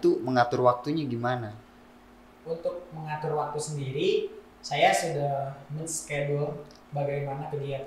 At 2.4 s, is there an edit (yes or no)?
no